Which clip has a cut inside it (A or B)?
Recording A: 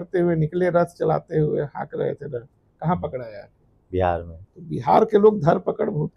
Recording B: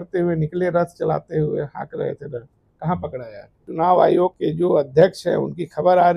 B